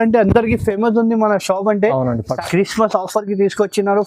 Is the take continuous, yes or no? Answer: no